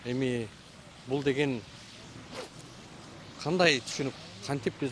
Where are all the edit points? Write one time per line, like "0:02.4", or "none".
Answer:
none

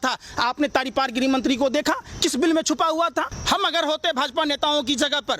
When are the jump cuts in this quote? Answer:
0:03.4

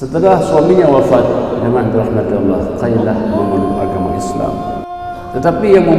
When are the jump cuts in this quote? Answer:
0:04.9

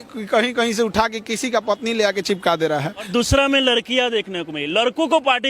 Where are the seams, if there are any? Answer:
0:03.1

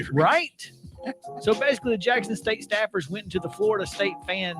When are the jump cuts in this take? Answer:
0:03.3

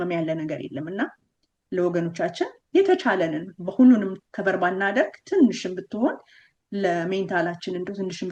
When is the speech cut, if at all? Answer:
none

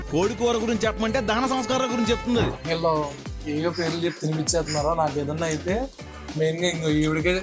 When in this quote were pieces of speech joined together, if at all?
0:02.5

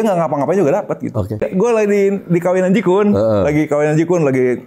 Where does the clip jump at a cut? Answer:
0:01.4

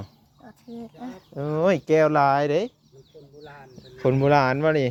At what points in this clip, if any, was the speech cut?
none

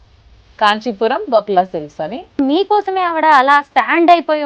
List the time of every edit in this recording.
0:02.4

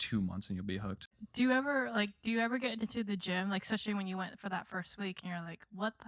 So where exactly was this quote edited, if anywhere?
0:01.2

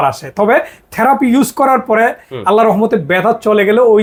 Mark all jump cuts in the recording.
none

